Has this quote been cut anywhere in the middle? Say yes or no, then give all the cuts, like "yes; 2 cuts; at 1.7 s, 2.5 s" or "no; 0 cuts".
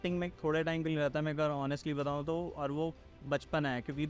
no; 0 cuts